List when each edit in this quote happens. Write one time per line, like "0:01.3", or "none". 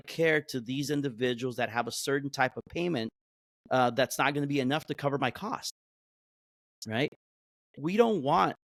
none